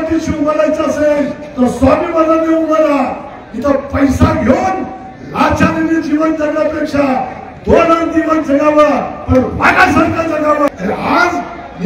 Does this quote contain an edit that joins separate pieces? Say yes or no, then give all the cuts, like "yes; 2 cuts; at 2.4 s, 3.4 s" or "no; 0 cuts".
yes; 1 cut; at 10.7 s